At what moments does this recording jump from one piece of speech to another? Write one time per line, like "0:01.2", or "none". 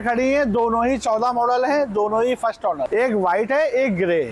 none